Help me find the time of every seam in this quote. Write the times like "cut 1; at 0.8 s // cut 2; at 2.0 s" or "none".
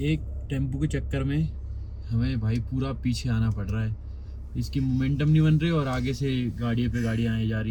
none